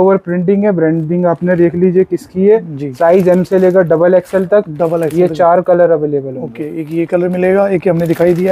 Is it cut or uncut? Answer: uncut